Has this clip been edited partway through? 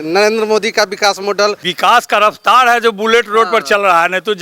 yes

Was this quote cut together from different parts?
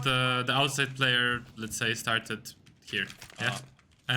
yes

